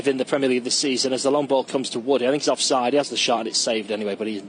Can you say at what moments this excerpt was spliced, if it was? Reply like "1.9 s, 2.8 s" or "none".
1.8 s